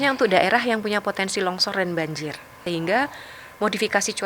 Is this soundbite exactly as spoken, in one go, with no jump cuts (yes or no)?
no